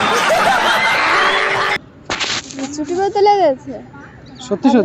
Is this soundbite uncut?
yes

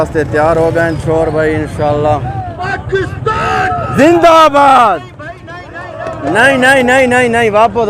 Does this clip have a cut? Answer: yes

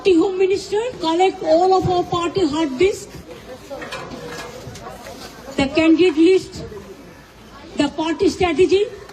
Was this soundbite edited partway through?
yes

